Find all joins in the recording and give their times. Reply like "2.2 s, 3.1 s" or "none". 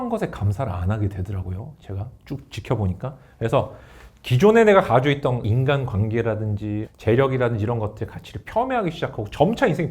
5.4 s, 6.9 s